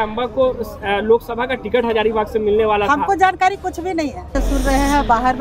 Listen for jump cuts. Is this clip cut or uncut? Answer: cut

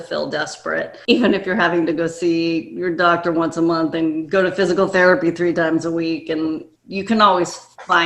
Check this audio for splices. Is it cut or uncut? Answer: cut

